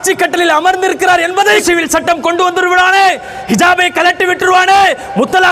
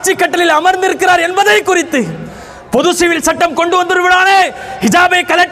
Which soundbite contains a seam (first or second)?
first